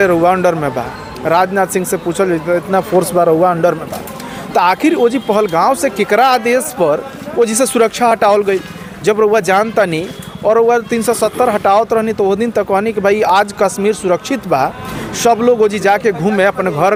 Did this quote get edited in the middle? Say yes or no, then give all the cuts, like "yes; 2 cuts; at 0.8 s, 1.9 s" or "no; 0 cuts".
no; 0 cuts